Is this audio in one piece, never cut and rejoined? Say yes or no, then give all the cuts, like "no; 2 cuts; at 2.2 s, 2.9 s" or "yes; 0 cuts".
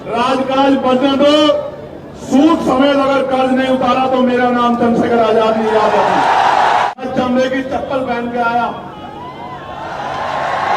no; 1 cut; at 6.9 s